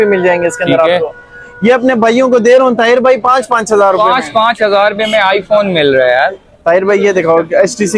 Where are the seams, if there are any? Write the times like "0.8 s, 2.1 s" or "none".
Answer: none